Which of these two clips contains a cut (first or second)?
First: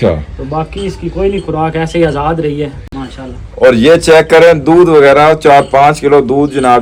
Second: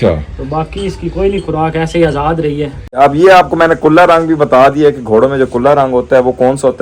second